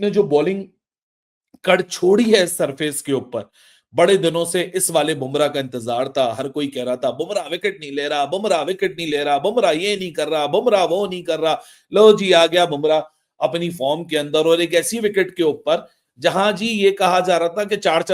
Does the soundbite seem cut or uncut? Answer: uncut